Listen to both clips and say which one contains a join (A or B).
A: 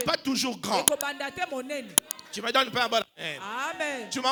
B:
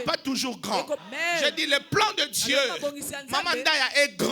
B